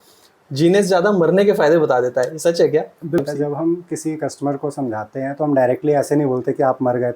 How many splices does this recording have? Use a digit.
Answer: 1